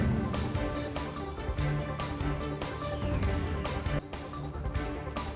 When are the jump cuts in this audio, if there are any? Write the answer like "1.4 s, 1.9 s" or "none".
1.0 s